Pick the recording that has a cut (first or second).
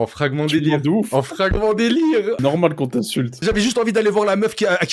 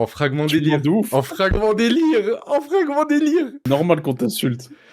first